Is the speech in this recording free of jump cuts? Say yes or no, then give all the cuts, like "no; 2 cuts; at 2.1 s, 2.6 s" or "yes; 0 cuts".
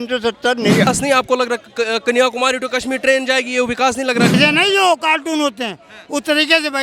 no; 2 cuts; at 0.9 s, 4.4 s